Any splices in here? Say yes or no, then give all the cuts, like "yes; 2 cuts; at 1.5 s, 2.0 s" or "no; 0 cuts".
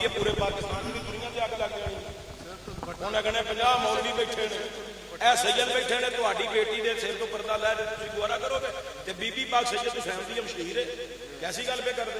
no; 0 cuts